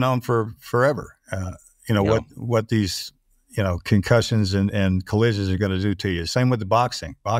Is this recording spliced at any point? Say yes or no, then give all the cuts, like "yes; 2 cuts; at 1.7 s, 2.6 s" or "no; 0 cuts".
no; 0 cuts